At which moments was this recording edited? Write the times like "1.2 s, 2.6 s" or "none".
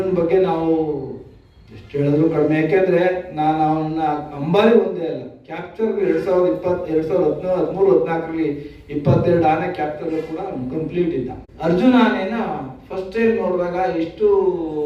11.4 s

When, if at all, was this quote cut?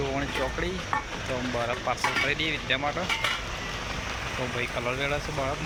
none

